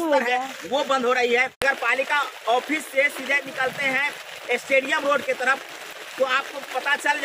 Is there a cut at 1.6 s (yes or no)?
yes